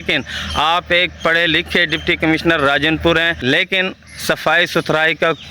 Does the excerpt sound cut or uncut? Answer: cut